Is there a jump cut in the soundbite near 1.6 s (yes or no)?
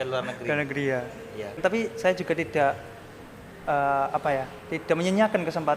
yes